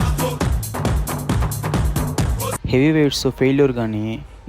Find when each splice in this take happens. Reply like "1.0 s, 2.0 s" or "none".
2.5 s